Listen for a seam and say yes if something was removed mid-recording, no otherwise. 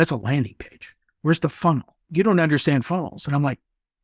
yes